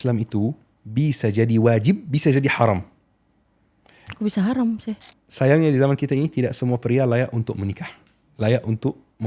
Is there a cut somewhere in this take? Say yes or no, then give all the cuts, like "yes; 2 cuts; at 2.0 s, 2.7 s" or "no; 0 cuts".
yes; 1 cut; at 5.0 s